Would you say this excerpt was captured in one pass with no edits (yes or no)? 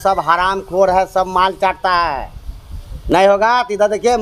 yes